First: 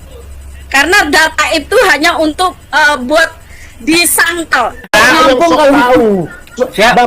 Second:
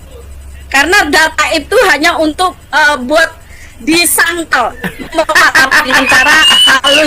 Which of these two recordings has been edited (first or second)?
first